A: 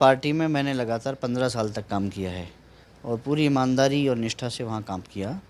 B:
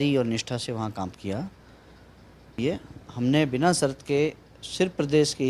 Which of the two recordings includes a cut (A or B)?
B